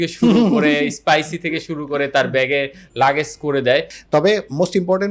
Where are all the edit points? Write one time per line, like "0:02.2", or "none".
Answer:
0:03.9